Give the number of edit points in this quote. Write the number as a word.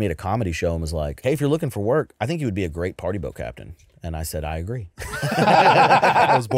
one